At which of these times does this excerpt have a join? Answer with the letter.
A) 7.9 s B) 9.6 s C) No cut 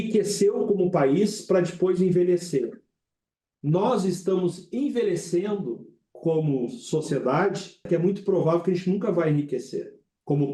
A